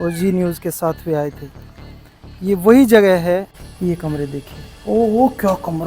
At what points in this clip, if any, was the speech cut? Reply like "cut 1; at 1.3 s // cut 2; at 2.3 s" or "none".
cut 1; at 3.6 s